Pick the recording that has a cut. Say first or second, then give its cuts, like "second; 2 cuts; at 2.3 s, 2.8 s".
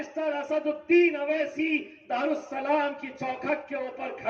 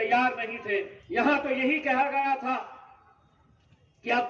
second; 1 cut; at 1.0 s